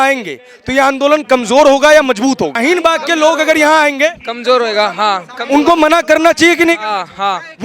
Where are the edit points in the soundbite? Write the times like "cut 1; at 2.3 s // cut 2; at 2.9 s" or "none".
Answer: cut 1; at 2.6 s